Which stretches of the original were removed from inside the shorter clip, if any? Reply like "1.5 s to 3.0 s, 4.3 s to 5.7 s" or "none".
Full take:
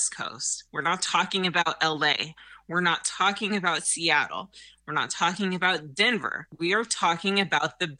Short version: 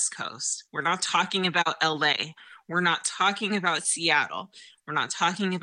none